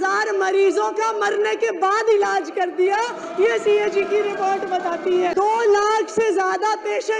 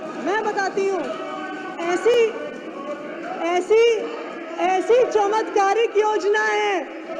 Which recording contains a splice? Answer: first; 1 cut; at 5.3 s

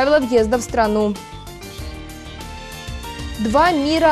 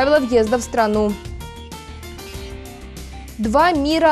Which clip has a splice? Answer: first; 2 cuts; at 1.8 s, 3.3 s

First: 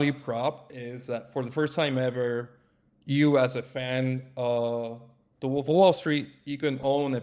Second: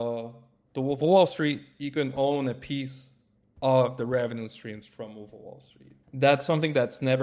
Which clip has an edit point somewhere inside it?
second; 1 cut; at 6.0 s

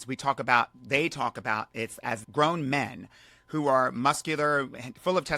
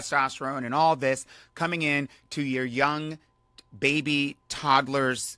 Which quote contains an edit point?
first; 1 cut; at 2.2 s

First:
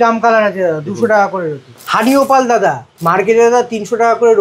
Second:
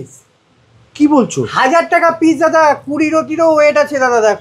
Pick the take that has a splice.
first; 2 cuts; at 1.7 s, 2.9 s

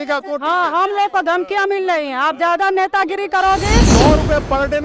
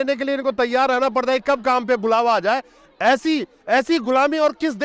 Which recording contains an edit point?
first; 1 cut; at 3.9 s

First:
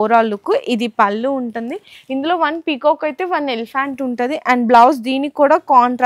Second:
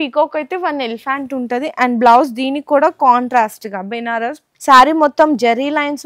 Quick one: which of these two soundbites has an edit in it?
second; 1 cut; at 4.5 s

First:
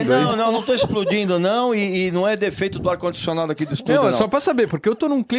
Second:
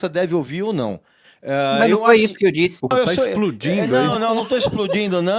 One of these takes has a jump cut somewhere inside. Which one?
second; 1 cut; at 2.9 s

